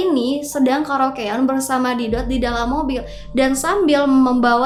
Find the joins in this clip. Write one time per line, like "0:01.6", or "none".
none